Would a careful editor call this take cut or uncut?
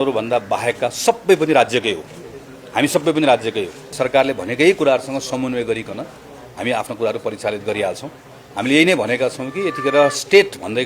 cut